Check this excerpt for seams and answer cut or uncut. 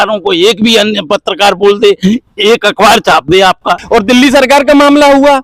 cut